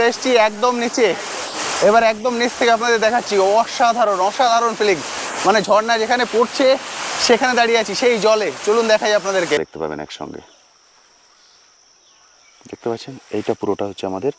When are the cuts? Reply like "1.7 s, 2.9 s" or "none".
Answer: 9.6 s